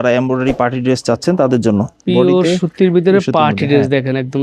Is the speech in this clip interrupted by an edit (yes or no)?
yes